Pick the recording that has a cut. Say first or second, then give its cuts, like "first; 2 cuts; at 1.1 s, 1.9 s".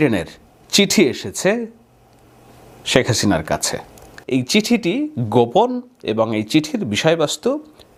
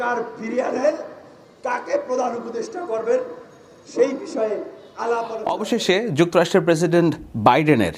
second; 1 cut; at 5.6 s